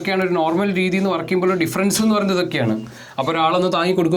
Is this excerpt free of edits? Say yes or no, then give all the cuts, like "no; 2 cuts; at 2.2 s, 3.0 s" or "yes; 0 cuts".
yes; 0 cuts